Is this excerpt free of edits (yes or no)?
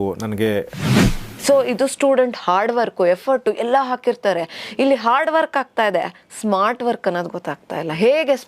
no